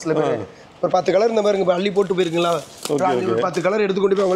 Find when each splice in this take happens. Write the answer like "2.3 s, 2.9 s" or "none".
none